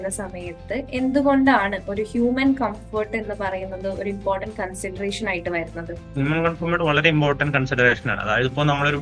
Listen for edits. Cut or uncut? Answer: uncut